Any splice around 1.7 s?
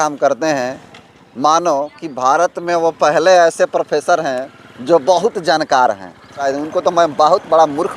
no; 1 cut; at 6.4 s

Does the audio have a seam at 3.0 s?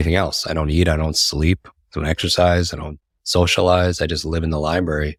no; 0 cuts

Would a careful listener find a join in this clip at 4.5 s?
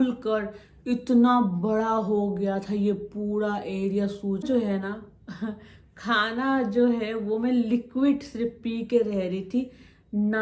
yes; 1 cut; at 4.5 s

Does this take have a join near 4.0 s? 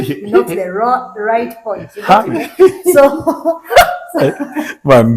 no; 0 cuts

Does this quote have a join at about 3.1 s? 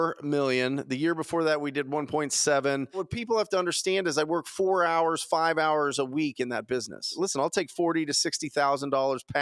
yes; 2 cuts; at 3.1 s, 7.1 s

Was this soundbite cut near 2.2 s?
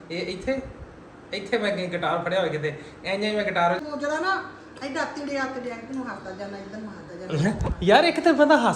no; 1 cut; at 3.8 s

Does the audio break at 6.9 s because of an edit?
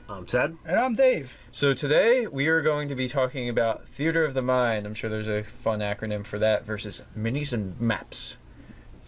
no; 1 cut; at 4.6 s

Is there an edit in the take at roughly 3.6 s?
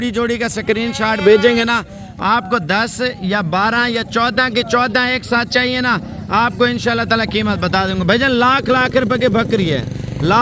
no; 0 cuts

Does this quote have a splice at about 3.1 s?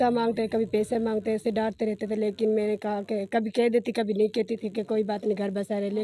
no; 1 cut; at 1.4 s

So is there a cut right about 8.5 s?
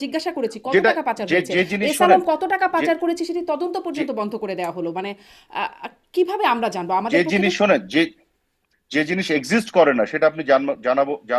no; 0 cuts

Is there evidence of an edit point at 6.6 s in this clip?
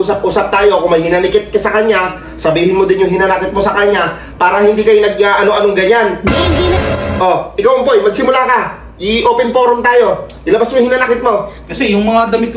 yes; 1 cut; at 6.6 s

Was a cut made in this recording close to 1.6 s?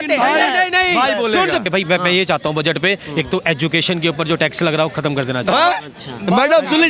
yes; 1 cut; at 1.6 s

